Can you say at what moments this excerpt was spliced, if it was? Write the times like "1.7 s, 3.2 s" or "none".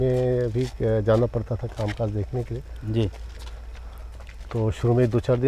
none